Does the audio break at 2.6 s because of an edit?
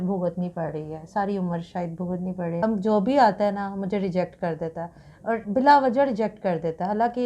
yes; 1 cut; at 2.6 s

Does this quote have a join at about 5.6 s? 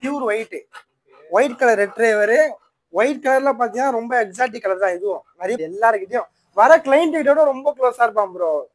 yes; 1 cut; at 5.6 s

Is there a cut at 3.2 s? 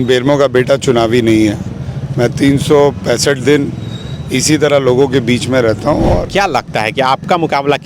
no; 1 cut; at 6.2 s

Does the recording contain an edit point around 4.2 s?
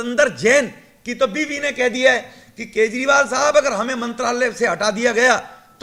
no; 0 cuts

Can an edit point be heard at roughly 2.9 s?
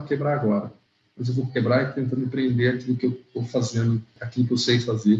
no; 1 cut; at 4.2 s

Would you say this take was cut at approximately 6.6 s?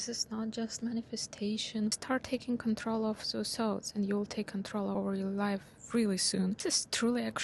yes; 3 cuts; at 1.9 s, 4.9 s, 6.6 s

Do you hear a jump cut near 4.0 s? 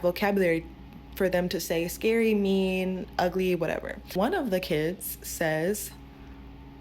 yes; 1 cut; at 4.0 s

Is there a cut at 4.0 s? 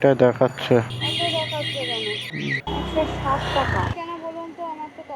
yes; 3 cuts; at 1.0 s, 2.6 s, 4.0 s

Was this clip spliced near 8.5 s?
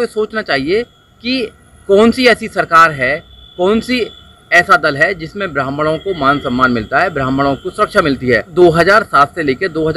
yes; 1 cut; at 8.5 s

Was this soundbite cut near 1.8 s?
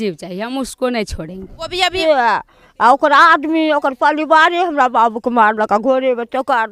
yes; 1 cut; at 1.8 s

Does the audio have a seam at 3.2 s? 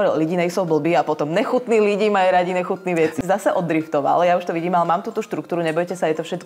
yes; 1 cut; at 3.2 s

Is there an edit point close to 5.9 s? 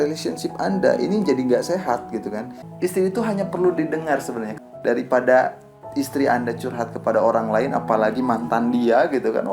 no; 2 cuts; at 2.6 s, 4.5 s

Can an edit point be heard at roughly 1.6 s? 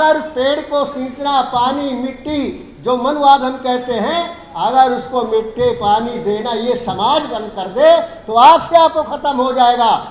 no; 0 cuts

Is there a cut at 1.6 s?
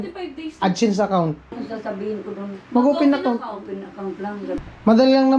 yes; 2 cuts; at 1.6 s, 4.6 s

